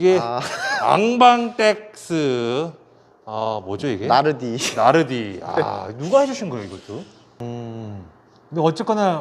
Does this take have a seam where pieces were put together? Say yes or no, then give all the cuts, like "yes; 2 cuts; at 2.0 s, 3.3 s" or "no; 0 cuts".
yes; 1 cut; at 7.4 s